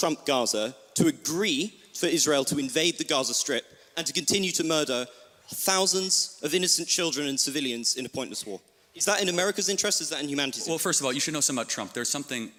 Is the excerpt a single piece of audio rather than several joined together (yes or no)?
yes